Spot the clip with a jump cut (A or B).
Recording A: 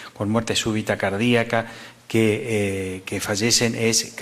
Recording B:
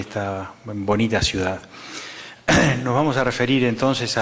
A